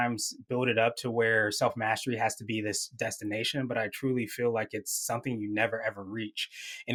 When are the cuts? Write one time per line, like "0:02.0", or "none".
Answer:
none